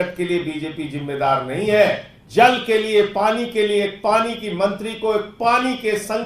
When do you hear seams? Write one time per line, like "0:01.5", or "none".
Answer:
0:02.1